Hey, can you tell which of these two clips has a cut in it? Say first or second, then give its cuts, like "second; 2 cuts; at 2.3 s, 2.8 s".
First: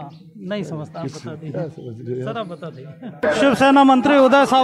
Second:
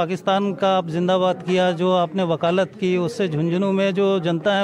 first; 1 cut; at 3.2 s